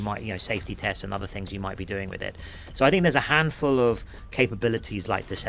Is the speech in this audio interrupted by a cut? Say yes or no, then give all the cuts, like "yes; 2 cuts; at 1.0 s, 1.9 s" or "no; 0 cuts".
no; 0 cuts